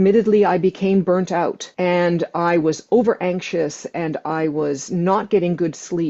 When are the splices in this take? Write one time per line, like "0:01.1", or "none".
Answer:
0:01.6